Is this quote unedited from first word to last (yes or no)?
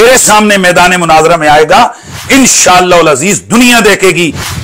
yes